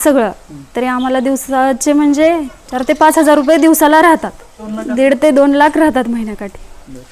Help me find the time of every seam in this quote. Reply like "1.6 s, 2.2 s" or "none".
none